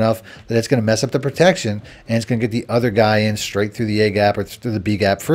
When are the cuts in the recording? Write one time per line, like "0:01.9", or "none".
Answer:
none